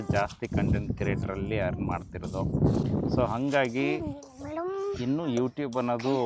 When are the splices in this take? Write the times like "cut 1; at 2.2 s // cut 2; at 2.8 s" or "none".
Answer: none